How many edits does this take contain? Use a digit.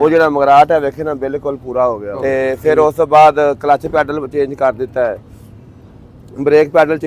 1